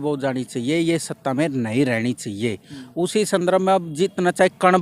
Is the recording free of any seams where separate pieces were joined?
yes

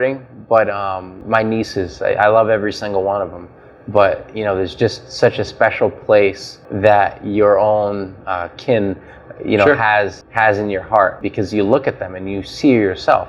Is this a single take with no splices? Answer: yes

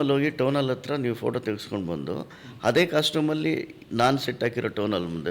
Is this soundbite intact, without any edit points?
yes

